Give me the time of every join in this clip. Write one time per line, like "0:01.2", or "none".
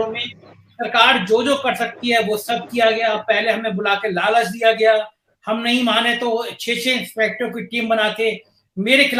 none